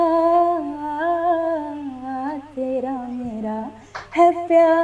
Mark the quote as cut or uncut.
uncut